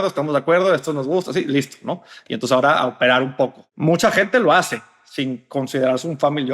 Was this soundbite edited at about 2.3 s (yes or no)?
no